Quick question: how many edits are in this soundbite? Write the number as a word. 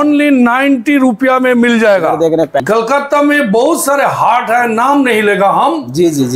one